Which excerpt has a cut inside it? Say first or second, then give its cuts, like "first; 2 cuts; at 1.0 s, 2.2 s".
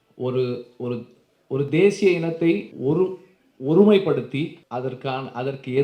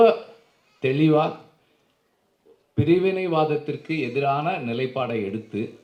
first; 2 cuts; at 2.7 s, 4.6 s